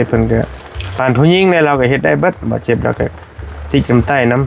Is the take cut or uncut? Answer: uncut